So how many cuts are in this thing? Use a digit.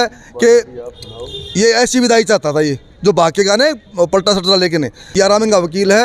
1